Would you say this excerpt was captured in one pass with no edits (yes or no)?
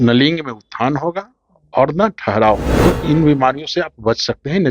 no